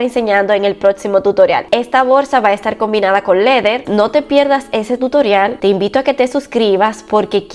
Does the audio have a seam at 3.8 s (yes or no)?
yes